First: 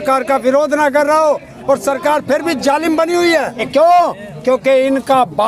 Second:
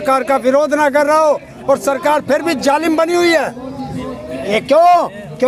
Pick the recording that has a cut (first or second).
first